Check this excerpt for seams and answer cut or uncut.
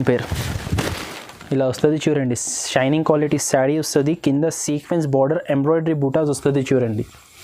uncut